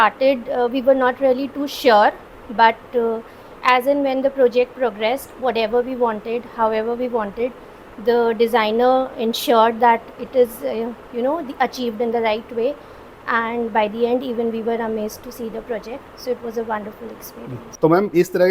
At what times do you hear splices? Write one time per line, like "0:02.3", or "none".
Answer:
none